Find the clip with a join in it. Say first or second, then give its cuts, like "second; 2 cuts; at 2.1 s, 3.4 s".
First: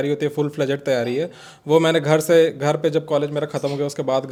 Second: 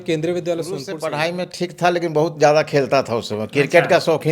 second; 1 cut; at 0.9 s